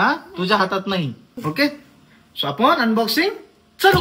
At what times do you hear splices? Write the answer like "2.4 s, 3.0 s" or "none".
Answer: 1.3 s

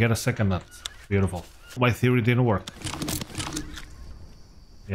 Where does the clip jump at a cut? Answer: 1.8 s

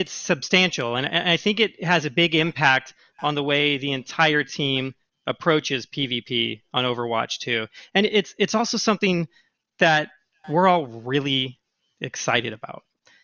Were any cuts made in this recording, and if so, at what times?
6.0 s

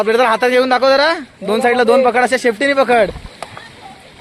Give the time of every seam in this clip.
none

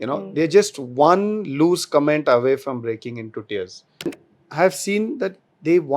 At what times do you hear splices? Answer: 4.1 s

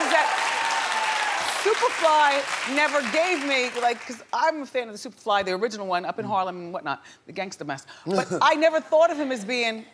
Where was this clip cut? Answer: none

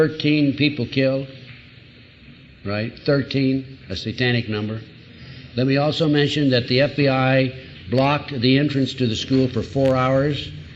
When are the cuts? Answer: 9.6 s

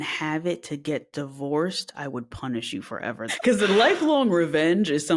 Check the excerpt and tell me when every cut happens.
3.3 s

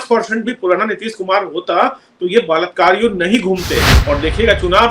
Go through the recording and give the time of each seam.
3.9 s

